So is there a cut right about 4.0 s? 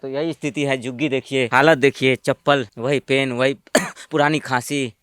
no; 2 cuts; at 1.5 s, 2.7 s

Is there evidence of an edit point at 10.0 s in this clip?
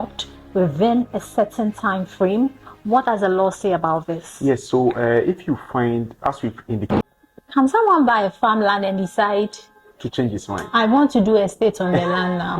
no; 1 cut; at 7.0 s

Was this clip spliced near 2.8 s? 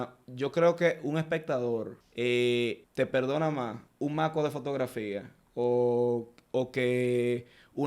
yes; 3 cuts; at 2.0 s, 2.8 s, 3.8 s

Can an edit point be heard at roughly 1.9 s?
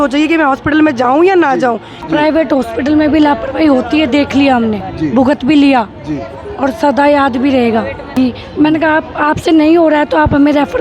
yes; 2 cuts; at 1.9 s, 8.1 s

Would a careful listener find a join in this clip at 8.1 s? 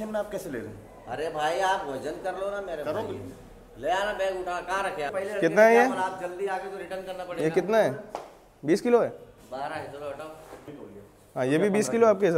no; 2 cuts; at 5.1 s, 10.7 s

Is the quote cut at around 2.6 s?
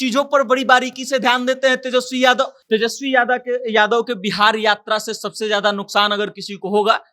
yes; 1 cut; at 2.6 s

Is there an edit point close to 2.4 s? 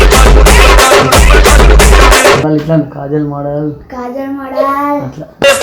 yes; 1 cut; at 2.4 s

